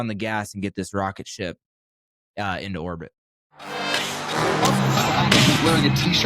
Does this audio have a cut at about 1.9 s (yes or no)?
no